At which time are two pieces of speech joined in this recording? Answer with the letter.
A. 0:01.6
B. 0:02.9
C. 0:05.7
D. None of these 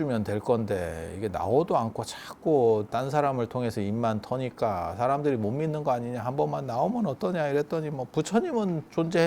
B